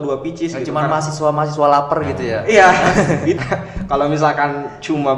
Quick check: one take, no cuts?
no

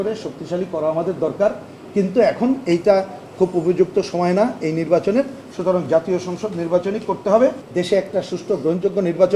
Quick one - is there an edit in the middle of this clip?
yes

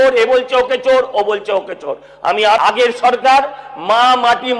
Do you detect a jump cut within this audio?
yes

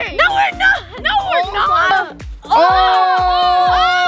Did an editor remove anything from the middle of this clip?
yes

